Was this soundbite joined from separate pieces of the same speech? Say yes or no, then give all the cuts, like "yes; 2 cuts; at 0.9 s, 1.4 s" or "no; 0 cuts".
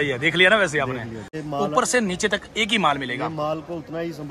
yes; 1 cut; at 1.3 s